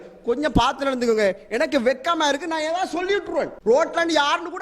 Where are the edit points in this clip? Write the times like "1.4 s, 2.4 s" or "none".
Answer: 3.6 s